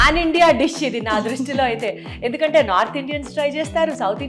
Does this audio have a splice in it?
no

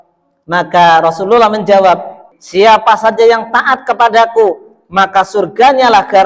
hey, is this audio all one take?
no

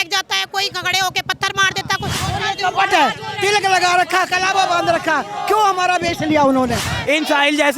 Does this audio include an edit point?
yes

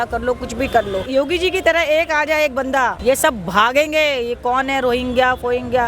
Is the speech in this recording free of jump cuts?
no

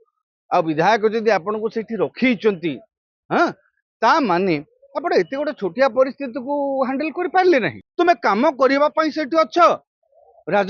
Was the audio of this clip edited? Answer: yes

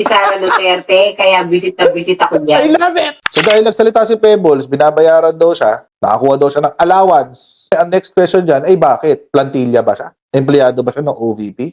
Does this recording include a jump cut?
yes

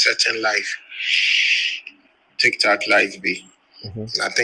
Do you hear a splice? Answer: no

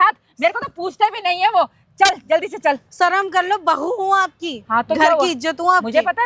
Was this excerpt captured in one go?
yes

